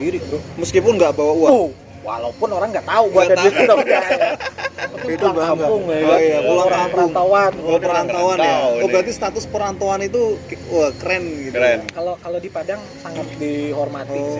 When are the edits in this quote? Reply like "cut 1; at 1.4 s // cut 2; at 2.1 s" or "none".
none